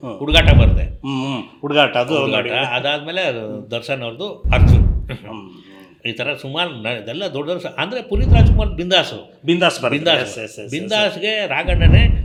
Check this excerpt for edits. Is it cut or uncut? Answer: uncut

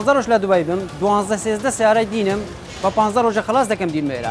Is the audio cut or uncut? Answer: uncut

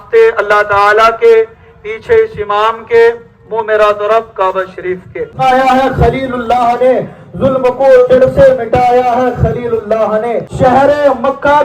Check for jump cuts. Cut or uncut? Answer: cut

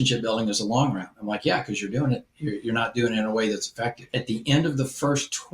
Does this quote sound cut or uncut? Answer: cut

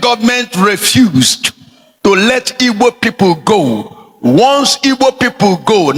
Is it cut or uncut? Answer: uncut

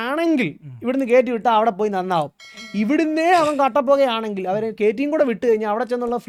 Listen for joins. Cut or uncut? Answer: uncut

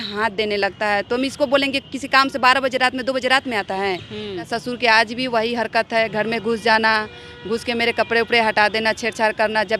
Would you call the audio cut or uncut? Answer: cut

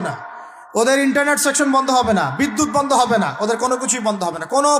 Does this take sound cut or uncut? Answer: uncut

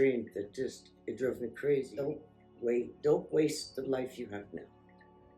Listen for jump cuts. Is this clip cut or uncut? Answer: cut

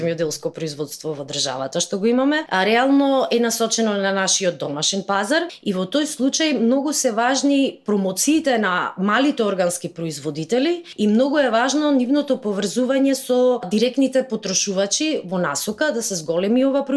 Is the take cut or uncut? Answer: cut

